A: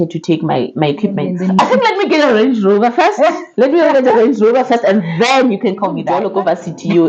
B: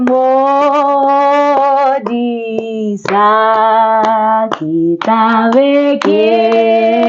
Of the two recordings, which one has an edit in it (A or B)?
A